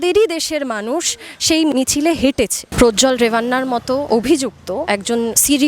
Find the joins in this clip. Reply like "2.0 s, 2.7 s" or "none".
2.6 s, 4.0 s, 4.9 s